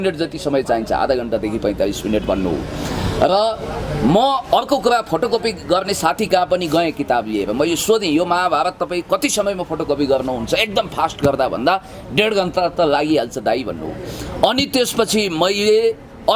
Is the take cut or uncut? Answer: uncut